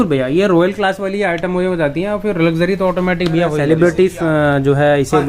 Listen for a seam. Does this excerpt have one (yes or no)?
yes